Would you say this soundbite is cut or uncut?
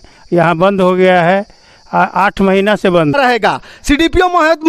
cut